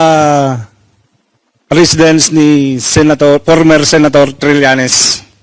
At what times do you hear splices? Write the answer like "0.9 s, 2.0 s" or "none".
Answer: none